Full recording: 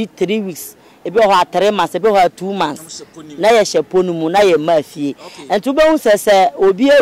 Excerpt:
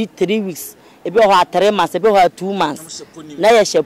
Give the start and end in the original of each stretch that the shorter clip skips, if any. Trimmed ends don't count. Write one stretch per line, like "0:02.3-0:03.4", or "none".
none